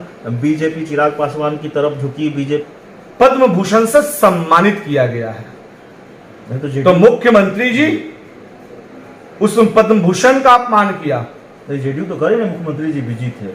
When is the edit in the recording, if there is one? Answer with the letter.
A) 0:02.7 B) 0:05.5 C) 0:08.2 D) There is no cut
A